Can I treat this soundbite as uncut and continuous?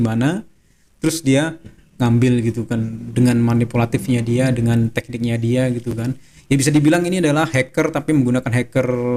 yes; 0 cuts

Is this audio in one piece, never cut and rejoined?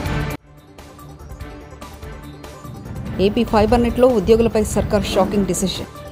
yes; 0 cuts

